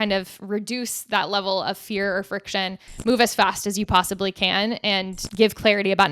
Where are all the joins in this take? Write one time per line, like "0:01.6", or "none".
0:05.2